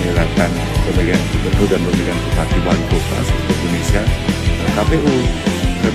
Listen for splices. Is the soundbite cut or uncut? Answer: uncut